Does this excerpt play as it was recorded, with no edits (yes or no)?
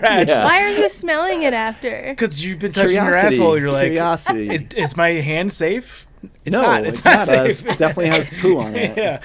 yes